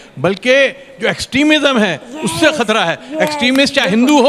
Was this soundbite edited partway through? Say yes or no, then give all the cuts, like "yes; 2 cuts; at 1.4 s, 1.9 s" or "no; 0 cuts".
no; 0 cuts